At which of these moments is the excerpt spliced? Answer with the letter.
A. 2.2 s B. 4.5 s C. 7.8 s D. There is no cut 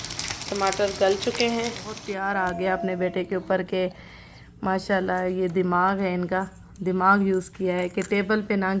A